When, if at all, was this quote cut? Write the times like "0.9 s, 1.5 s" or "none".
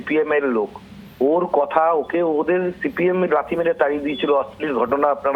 none